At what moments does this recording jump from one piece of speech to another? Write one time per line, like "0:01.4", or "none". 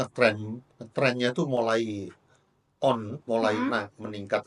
none